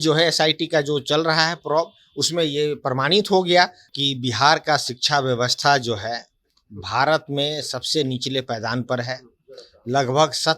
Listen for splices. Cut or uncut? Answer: cut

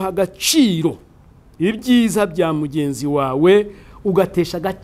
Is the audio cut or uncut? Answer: uncut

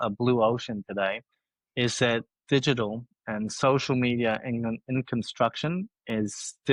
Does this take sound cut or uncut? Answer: uncut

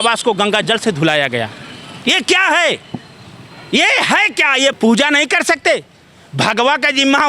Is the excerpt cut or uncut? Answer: cut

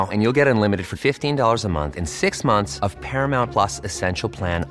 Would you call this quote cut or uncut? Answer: uncut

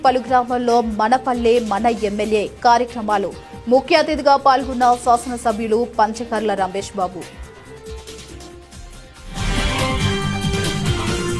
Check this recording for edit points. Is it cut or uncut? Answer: cut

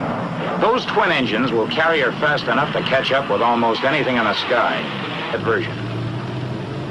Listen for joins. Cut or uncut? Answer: uncut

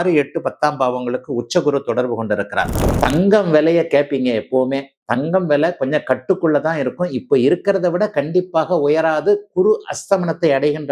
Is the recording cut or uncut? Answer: cut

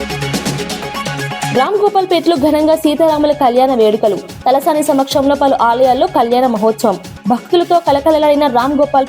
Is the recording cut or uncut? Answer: cut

